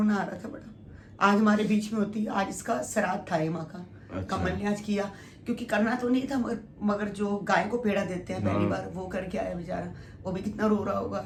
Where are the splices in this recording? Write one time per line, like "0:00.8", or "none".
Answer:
none